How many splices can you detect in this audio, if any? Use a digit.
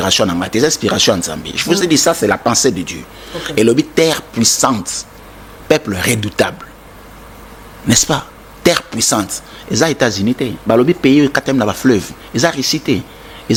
0